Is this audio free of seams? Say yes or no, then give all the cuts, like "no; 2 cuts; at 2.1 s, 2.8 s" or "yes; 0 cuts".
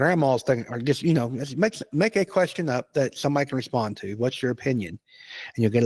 yes; 0 cuts